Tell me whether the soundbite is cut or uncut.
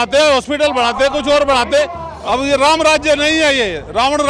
cut